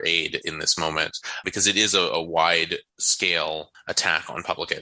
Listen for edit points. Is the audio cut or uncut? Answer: uncut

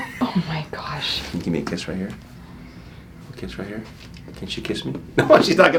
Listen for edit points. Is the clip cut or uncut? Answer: uncut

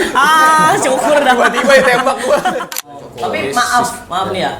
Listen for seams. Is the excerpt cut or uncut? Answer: cut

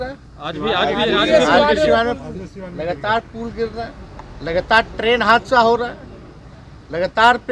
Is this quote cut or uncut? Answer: uncut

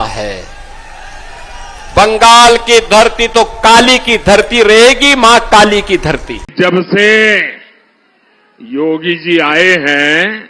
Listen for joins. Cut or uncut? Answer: cut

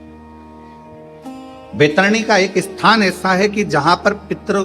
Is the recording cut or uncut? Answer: uncut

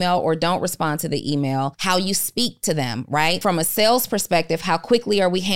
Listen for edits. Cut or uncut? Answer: cut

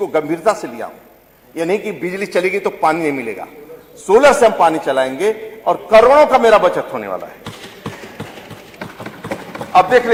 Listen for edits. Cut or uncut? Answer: uncut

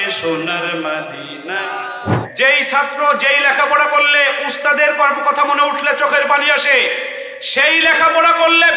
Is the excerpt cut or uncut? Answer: cut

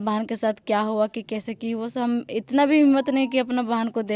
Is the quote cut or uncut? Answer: uncut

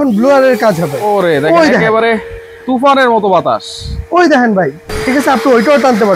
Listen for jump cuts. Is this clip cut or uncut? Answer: cut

